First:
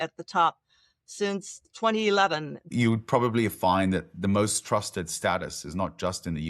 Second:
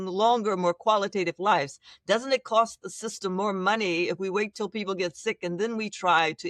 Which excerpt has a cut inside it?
first; 1 cut; at 2.7 s

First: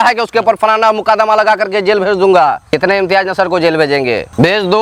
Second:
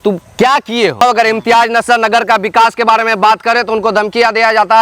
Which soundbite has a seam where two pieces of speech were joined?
second; 1 cut; at 1.0 s

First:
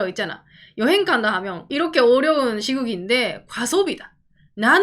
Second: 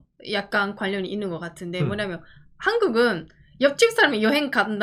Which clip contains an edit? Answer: first; 1 cut; at 1.6 s

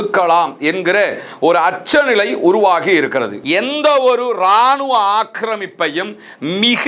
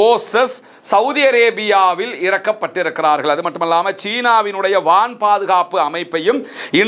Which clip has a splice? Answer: first; 1 cut; at 3.4 s

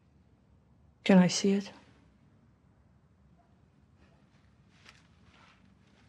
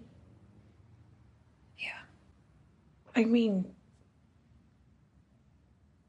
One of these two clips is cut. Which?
second; 1 cut; at 2.3 s

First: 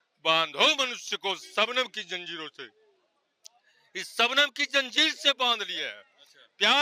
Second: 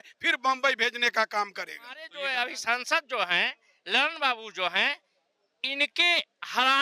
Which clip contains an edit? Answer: second; 1 cut; at 2.1 s

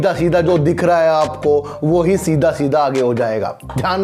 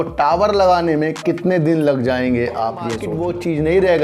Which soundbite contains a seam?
second; 1 cut; at 3.1 s

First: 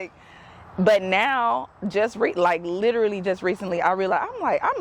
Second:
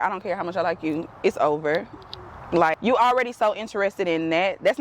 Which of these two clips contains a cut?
second; 1 cut; at 2.8 s

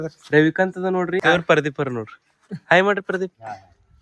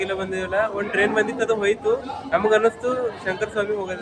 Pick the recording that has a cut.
first; 1 cut; at 1.2 s

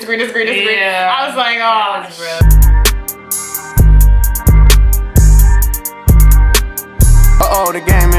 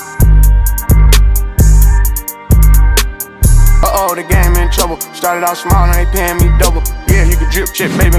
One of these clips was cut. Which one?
first; 1 cut; at 2.4 s

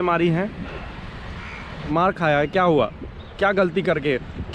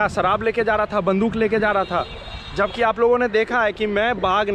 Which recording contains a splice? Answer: first; 1 cut; at 1.8 s

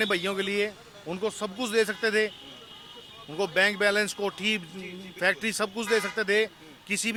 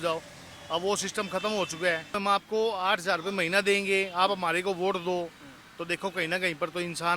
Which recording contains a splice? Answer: second; 1 cut; at 2.1 s

